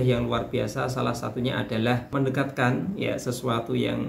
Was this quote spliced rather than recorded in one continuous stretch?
yes; 1 cut; at 2.1 s

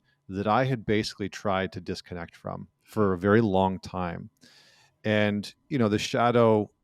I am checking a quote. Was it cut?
no; 0 cuts

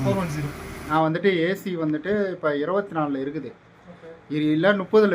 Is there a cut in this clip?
yes; 1 cut; at 1.2 s

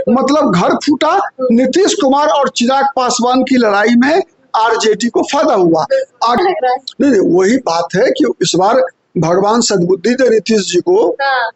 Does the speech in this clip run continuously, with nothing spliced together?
no; 1 cut; at 6.4 s

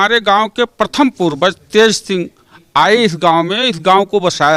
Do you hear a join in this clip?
no; 0 cuts

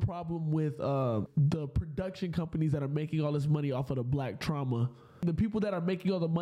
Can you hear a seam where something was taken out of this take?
yes; 2 cuts; at 1.3 s, 5.2 s

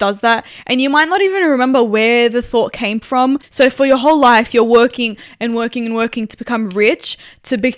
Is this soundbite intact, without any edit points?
no; 1 cut; at 3.5 s

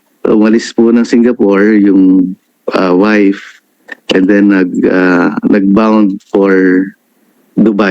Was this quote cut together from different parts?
no; 0 cuts

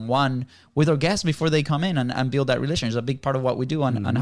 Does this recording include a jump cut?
no; 0 cuts

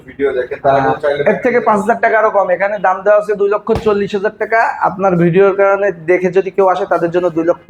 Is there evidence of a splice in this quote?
no; 0 cuts

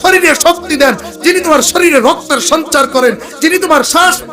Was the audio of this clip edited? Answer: no; 0 cuts

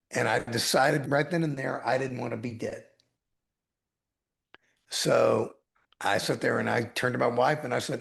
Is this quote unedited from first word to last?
no; 1 cut; at 1.0 s

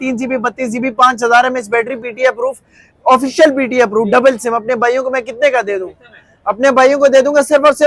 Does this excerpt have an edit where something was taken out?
no; 0 cuts

